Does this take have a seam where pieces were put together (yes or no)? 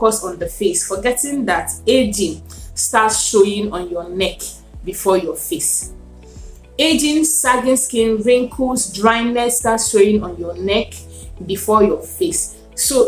no